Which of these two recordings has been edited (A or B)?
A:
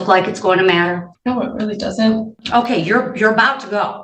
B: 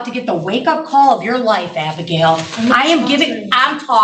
A